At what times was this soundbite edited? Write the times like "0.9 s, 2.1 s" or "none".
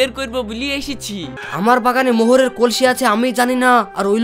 1.4 s